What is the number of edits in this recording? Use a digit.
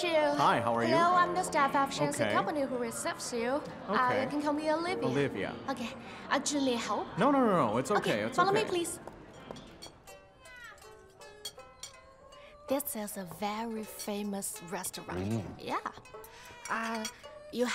1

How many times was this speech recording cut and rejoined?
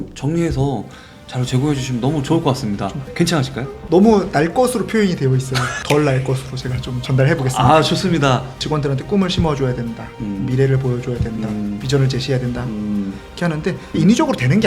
1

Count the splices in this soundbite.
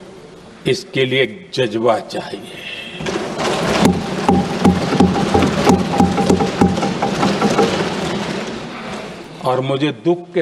1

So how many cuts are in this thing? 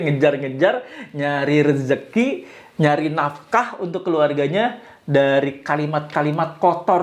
0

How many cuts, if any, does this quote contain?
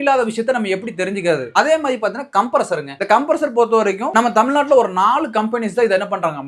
3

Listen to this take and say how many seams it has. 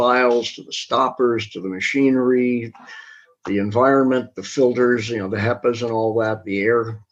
0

